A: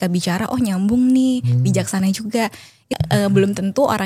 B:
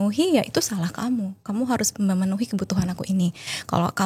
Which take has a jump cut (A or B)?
A